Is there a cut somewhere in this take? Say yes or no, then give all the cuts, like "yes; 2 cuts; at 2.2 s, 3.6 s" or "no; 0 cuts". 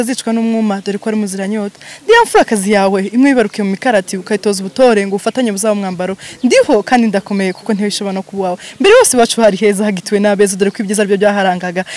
no; 0 cuts